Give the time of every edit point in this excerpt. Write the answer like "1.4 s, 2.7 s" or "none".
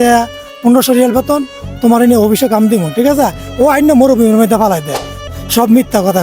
5.2 s

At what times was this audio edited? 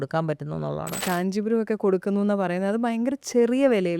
1.0 s

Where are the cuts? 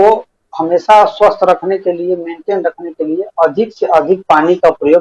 none

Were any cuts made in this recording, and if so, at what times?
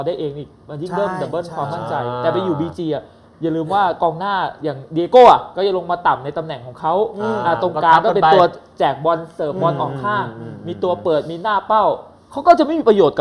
none

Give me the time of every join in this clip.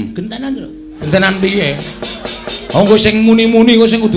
1.1 s

